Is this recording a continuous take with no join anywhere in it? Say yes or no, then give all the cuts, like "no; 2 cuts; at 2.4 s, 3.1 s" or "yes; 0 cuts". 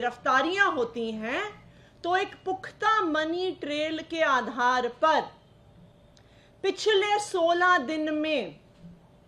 yes; 0 cuts